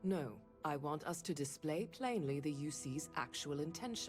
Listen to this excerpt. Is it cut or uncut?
uncut